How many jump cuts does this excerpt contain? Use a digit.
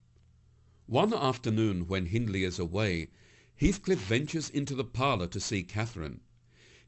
0